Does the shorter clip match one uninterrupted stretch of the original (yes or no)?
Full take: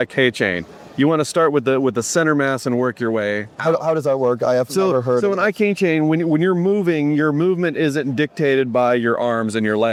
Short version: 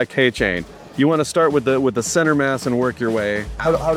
yes